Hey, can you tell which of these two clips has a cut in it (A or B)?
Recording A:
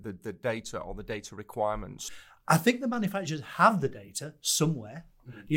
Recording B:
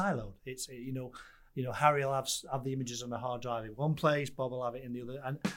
A